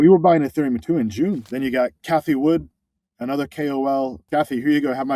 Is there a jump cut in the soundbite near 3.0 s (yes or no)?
no